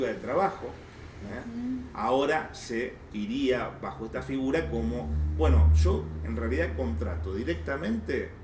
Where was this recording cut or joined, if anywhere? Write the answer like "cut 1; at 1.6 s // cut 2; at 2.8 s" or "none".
none